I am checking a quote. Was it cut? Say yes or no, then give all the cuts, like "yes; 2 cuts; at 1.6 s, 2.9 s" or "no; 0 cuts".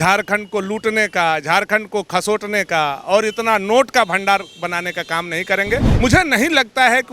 yes; 1 cut; at 5.9 s